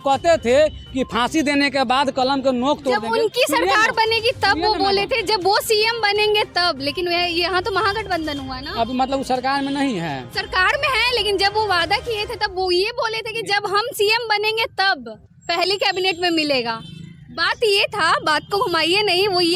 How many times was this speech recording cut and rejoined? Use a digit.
0